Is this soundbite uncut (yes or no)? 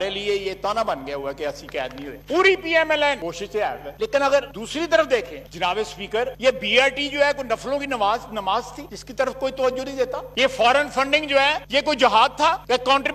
yes